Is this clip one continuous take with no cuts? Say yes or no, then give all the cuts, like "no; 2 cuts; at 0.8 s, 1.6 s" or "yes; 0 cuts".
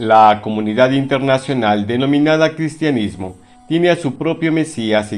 yes; 0 cuts